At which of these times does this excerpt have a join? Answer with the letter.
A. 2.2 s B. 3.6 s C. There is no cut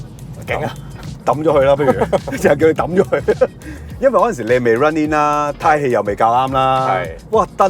C